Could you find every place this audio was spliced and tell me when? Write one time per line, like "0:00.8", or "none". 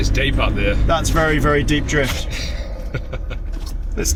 none